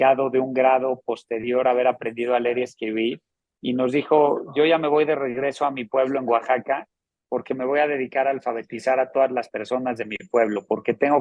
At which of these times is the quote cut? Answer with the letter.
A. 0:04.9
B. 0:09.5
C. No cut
C